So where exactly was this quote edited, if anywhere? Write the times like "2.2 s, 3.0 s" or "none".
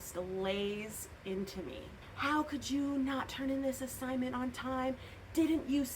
2.0 s